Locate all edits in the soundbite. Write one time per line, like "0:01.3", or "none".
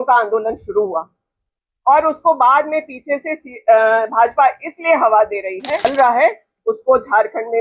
0:05.8